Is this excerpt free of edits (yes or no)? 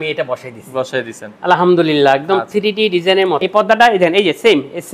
no